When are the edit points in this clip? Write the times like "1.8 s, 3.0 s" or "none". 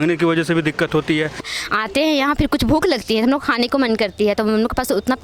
1.5 s